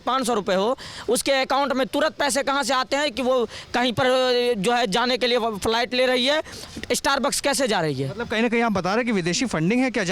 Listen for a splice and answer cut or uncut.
uncut